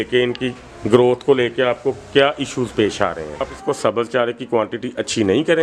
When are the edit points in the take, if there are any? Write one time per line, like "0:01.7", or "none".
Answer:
0:03.5